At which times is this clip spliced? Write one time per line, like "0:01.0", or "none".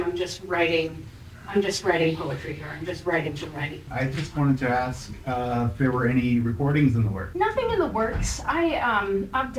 0:03.9
0:07.2